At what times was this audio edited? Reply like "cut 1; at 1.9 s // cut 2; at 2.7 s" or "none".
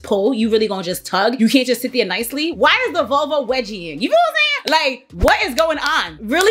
none